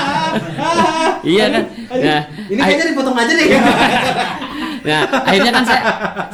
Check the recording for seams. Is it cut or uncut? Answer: uncut